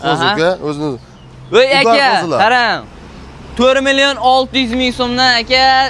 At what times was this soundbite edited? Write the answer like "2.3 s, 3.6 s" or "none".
none